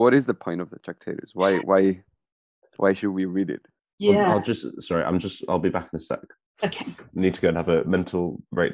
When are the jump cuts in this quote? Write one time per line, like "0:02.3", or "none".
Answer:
none